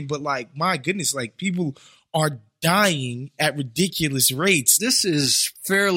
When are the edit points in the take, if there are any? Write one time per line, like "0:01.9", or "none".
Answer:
0:04.8